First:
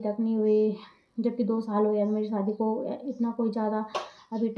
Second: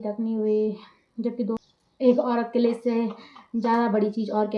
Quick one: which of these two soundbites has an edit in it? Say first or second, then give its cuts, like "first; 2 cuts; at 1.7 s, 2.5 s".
second; 1 cut; at 1.6 s